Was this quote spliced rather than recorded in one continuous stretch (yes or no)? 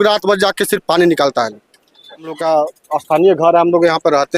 yes